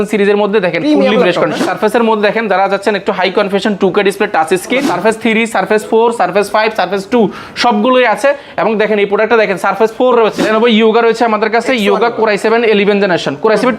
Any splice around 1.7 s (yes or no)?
yes